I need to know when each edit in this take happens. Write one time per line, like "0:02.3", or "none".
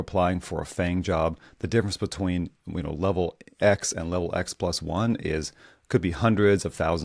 none